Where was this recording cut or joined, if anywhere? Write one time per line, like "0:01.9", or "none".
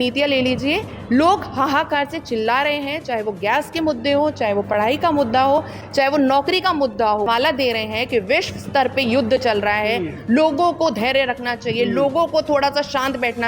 0:07.3